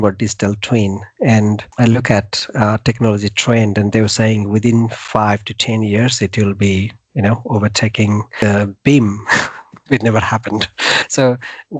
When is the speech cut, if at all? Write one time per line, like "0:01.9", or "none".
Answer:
0:01.7
0:08.3
0:11.0